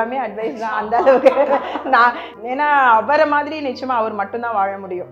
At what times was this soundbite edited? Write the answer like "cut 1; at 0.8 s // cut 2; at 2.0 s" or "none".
cut 1; at 2.3 s